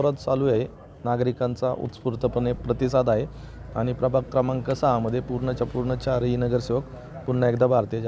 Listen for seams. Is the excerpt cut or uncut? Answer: cut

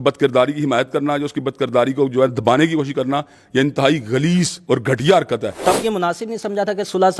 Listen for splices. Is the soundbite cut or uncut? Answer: cut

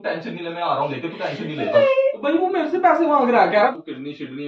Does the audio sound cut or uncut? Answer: cut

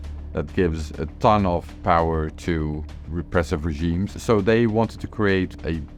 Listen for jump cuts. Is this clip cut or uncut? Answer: uncut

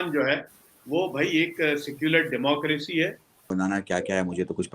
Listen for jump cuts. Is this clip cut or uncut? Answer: cut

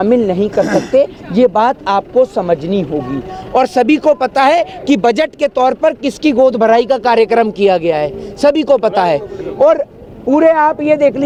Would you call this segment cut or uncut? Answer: uncut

